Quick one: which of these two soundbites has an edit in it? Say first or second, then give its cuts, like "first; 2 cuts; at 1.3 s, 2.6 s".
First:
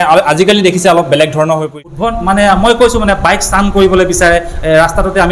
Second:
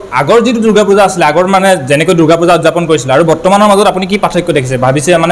first; 1 cut; at 1.8 s